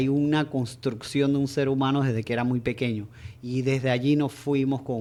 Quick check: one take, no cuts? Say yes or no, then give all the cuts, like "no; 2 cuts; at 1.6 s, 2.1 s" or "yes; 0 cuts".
yes; 0 cuts